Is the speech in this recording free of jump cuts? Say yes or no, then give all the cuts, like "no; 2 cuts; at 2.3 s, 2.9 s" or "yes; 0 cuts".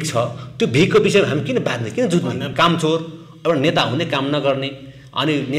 no; 1 cut; at 2.5 s